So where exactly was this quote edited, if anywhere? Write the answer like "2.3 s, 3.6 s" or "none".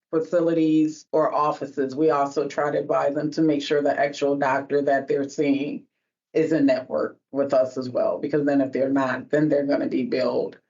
1.0 s